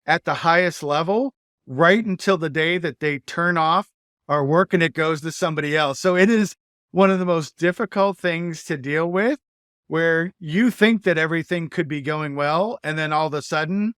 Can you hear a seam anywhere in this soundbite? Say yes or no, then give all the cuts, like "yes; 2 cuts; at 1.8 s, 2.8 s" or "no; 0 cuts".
no; 0 cuts